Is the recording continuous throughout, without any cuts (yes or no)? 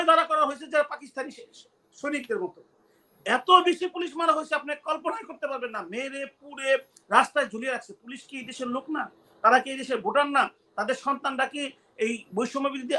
yes